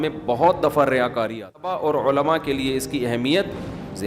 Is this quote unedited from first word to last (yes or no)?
no